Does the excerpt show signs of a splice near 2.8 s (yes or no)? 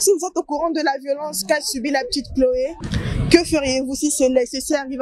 yes